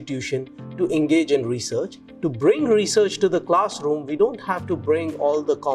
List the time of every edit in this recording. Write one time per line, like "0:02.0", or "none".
0:02.0